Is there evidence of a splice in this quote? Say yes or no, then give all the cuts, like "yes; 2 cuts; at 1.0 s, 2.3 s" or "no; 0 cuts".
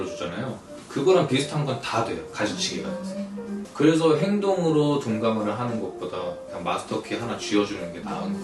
no; 0 cuts